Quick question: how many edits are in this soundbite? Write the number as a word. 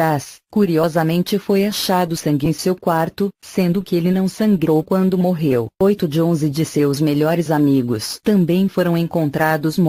zero